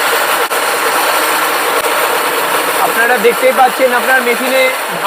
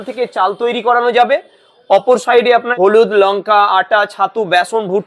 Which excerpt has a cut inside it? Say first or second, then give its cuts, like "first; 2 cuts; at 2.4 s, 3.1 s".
second; 1 cut; at 2.7 s